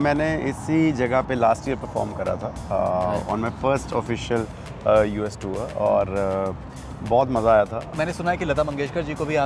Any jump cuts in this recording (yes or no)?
yes